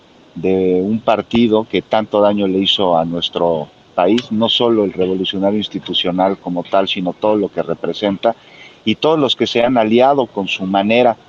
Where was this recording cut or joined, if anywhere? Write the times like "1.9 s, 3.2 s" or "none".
none

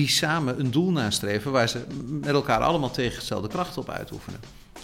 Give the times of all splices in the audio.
none

